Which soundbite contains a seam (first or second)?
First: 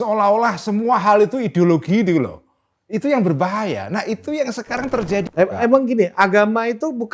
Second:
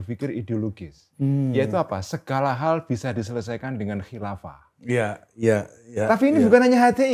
first